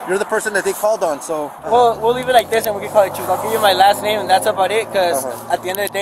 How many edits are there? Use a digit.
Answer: 1